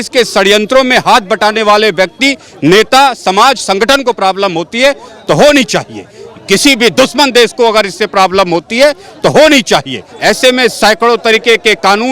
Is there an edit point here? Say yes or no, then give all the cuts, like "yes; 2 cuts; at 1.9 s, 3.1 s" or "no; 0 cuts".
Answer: yes; 1 cut; at 10.0 s